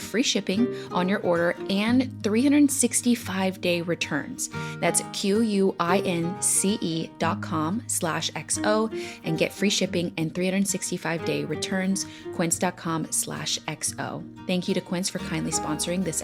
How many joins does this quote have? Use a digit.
0